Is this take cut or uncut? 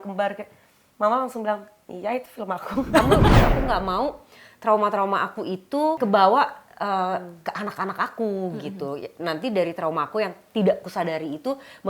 cut